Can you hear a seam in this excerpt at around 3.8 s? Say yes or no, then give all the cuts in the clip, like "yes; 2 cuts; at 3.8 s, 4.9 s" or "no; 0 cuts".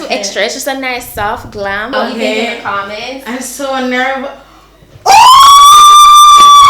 no; 1 cut; at 1.9 s